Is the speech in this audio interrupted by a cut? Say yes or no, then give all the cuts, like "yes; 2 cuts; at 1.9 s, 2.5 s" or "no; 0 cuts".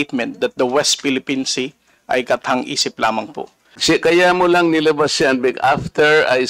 yes; 1 cut; at 3.7 s